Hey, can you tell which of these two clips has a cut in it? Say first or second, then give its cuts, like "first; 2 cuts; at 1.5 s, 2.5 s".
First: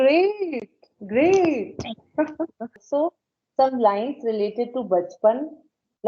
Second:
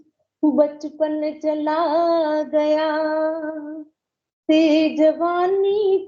first; 1 cut; at 2.8 s